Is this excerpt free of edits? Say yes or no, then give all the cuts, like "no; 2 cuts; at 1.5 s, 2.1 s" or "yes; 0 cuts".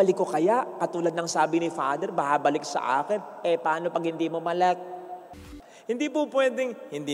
no; 1 cut; at 5.4 s